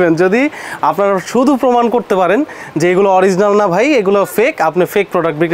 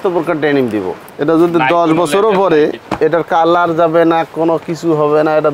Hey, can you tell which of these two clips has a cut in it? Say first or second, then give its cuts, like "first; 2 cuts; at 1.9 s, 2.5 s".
second; 2 cuts; at 1.0 s, 2.8 s